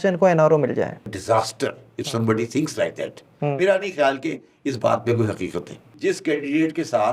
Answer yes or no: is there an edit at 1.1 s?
yes